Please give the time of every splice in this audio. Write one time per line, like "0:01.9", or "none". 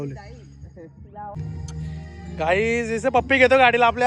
0:01.4